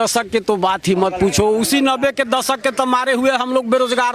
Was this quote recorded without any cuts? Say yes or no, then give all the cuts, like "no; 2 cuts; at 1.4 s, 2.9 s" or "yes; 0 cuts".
yes; 0 cuts